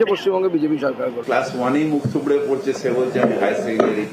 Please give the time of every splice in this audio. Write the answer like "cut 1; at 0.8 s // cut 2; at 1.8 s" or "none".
cut 1; at 1.2 s